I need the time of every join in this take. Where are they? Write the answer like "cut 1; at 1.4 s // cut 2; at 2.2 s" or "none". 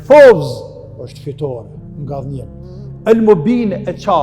none